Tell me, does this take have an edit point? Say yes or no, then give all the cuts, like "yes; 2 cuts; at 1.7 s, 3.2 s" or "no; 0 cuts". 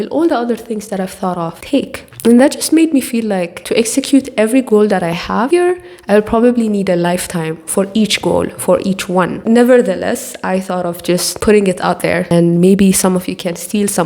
no; 0 cuts